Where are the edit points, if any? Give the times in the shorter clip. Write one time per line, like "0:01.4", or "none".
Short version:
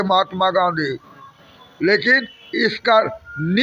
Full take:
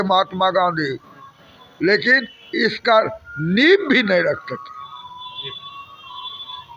none